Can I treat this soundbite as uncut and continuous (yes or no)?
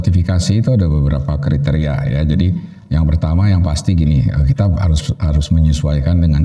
yes